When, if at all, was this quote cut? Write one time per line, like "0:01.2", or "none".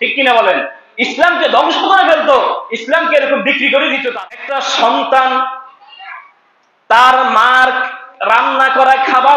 0:04.0